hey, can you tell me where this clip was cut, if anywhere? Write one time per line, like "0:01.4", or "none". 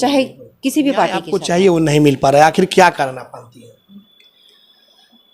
0:01.3